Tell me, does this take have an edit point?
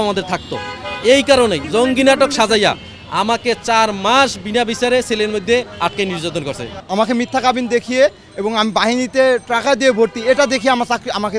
yes; 2 cuts; at 1.6 s, 6.7 s

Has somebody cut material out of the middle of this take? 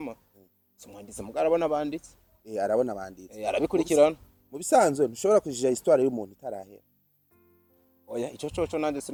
no; 0 cuts

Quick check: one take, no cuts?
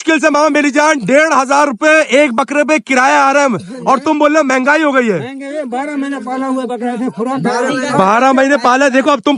yes; 0 cuts

